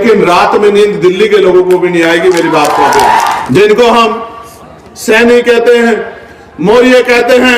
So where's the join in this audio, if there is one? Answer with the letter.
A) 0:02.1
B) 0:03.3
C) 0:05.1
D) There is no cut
B